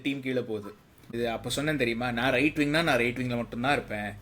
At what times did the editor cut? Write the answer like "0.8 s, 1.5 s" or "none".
1.1 s